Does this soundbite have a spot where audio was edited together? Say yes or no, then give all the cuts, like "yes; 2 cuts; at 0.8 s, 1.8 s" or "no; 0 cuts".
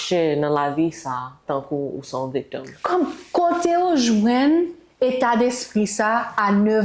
no; 0 cuts